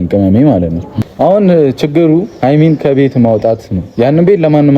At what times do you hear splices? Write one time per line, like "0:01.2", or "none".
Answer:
0:01.0